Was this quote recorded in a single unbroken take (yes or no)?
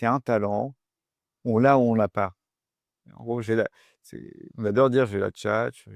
yes